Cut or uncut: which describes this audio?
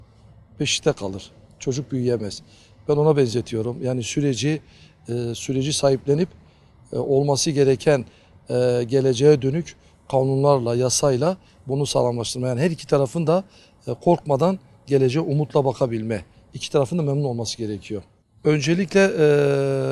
uncut